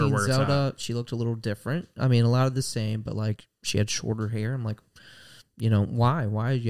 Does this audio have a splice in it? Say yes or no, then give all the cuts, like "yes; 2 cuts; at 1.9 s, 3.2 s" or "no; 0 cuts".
no; 0 cuts